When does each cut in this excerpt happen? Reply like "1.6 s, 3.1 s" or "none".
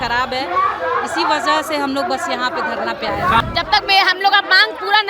3.4 s